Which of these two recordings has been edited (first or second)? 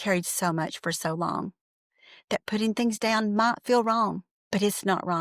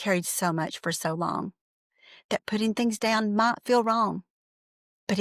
first